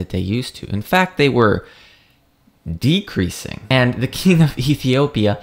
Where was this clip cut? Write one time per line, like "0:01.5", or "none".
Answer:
0:03.6